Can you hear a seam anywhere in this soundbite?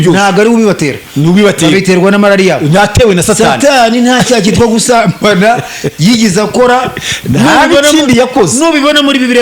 no; 0 cuts

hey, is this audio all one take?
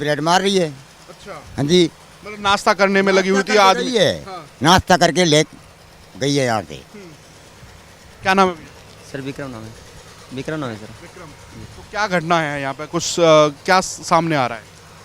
yes; 0 cuts

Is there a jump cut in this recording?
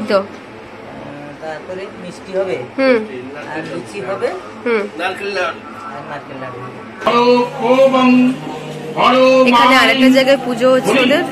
yes; 1 cut; at 7.1 s

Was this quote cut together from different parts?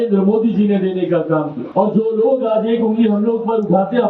yes; 1 cut; at 1.6 s

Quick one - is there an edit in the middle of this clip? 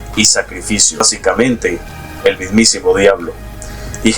yes; 1 cut; at 1.0 s

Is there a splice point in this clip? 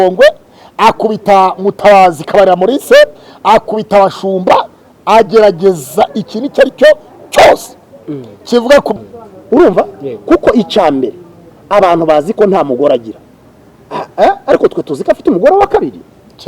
yes; 1 cut; at 8.9 s

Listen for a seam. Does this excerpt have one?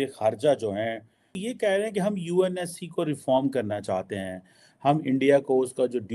yes; 1 cut; at 1.4 s

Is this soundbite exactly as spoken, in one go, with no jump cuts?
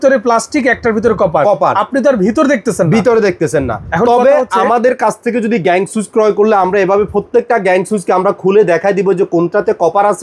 yes; 0 cuts

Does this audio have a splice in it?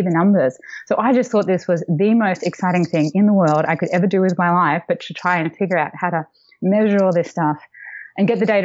no; 0 cuts

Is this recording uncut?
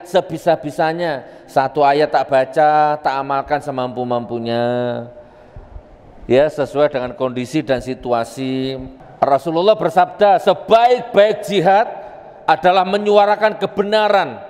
no; 1 cut; at 8.9 s

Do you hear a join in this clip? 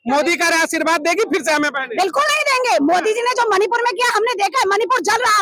no; 0 cuts

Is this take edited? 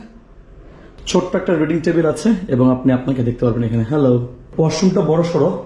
yes; 2 cuts; at 1.1 s, 4.4 s

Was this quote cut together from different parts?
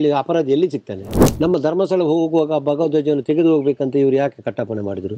yes; 1 cut; at 1.2 s

